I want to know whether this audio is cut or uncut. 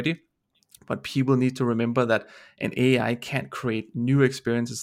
uncut